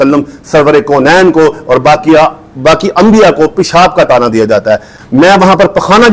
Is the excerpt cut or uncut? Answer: uncut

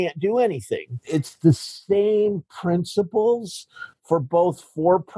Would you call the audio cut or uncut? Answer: cut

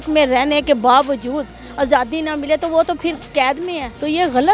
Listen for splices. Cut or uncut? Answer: uncut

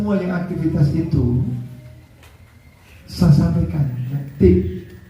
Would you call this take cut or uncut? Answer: cut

